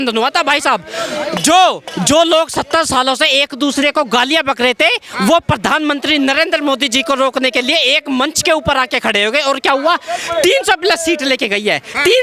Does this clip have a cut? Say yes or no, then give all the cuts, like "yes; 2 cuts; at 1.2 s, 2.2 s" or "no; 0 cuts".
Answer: no; 0 cuts